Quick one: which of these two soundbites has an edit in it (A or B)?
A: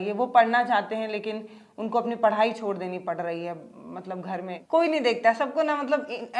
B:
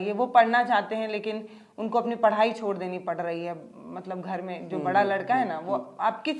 A